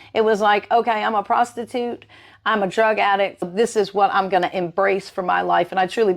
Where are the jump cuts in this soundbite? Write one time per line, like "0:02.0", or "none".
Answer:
0:03.5

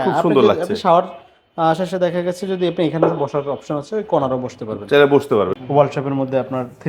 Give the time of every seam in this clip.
0:05.6

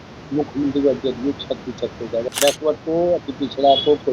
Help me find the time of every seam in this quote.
0:02.2

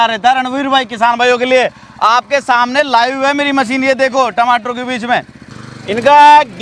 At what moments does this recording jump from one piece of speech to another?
none

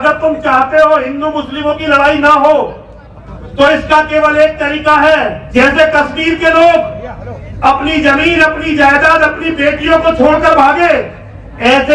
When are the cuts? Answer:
0:05.4

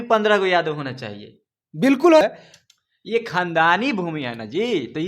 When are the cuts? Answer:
0:02.2

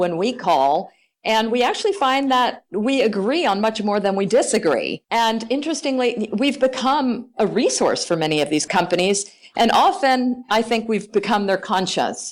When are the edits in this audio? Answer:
0:05.0
0:08.7

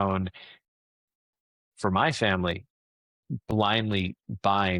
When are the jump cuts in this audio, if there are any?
none

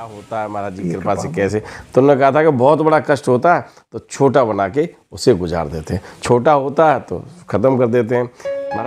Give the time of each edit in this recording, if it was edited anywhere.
none

